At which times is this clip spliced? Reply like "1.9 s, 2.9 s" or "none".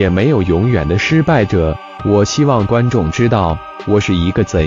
none